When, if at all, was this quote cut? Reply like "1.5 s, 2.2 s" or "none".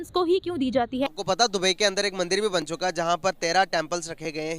1.1 s